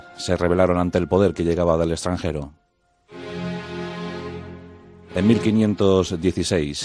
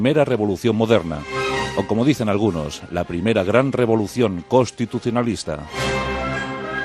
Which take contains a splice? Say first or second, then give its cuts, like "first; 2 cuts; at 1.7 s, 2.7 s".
second; 1 cut; at 2.8 s